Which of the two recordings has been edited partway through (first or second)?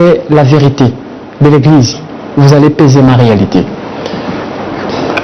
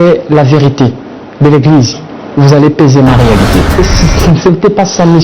second